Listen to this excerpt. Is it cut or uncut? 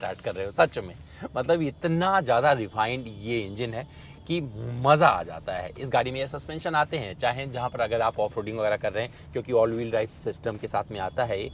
uncut